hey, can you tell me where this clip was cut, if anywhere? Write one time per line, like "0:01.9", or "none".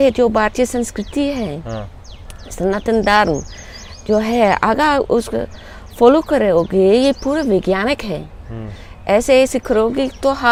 none

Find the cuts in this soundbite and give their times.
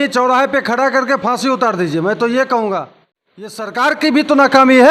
0:03.5

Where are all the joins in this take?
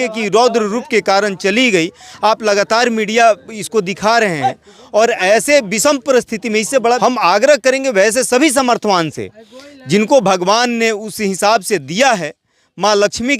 0:07.0

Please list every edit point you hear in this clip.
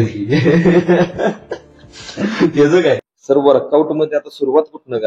0:03.0

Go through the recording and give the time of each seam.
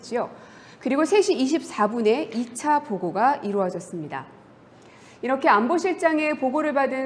0:01.7

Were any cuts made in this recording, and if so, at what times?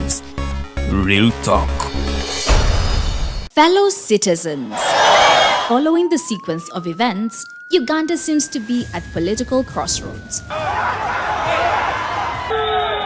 0:03.3

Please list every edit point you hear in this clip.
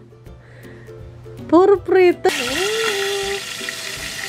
0:02.3

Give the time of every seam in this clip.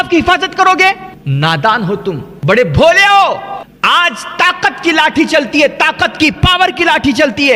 0:01.2
0:02.3
0:03.6

